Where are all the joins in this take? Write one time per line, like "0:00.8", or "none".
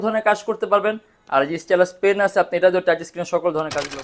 none